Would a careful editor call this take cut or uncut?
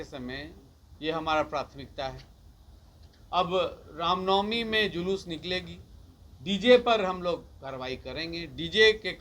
uncut